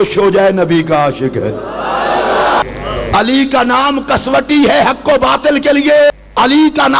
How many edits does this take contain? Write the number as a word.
two